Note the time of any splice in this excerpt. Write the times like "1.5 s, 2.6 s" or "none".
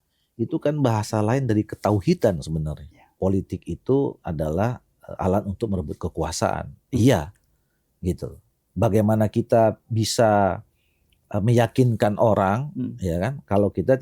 3.1 s